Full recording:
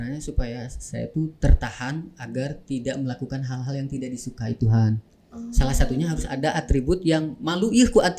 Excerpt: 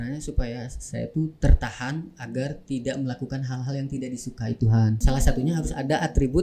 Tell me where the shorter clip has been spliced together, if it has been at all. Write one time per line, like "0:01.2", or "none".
0:05.0